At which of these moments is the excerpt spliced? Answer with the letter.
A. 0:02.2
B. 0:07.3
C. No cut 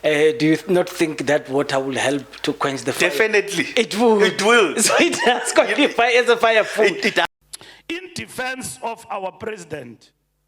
B